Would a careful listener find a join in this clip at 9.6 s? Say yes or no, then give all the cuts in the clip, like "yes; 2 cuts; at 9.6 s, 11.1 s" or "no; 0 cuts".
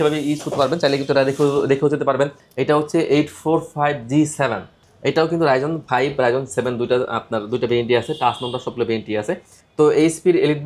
no; 1 cut; at 2.4 s